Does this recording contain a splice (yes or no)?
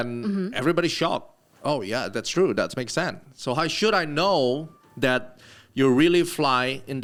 no